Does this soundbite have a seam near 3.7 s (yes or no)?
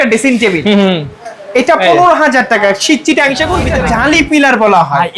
yes